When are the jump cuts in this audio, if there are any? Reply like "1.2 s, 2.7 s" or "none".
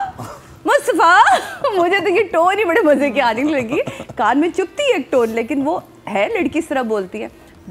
none